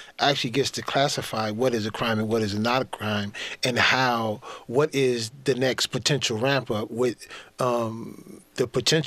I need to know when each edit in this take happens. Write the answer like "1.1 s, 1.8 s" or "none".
none